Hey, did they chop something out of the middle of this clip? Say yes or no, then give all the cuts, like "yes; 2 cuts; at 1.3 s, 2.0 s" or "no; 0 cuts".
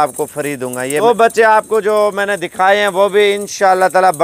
yes; 1 cut; at 1.0 s